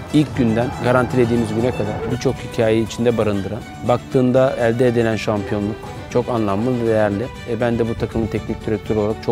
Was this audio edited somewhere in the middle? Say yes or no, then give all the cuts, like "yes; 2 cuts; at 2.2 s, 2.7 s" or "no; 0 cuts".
yes; 1 cut; at 3.7 s